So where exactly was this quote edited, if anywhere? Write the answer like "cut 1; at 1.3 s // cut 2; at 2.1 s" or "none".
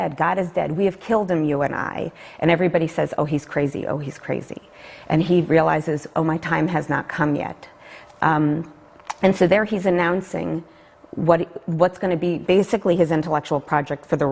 cut 1; at 9.4 s